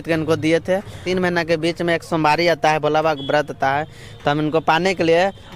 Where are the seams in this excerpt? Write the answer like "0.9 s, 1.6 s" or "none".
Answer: 1.0 s